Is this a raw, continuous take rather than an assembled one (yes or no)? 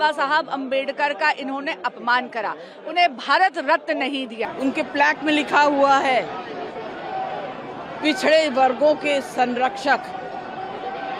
no